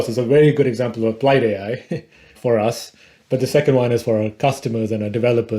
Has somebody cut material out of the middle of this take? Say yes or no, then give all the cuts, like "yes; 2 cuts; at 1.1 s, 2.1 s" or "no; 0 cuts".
no; 0 cuts